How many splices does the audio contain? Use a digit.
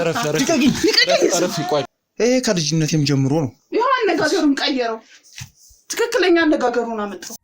1